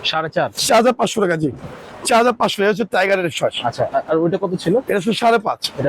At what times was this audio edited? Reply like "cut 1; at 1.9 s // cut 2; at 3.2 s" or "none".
none